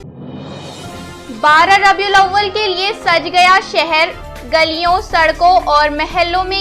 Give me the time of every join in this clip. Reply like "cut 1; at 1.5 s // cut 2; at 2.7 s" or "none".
none